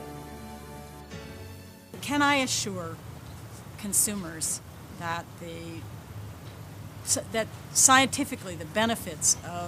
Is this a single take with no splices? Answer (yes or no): yes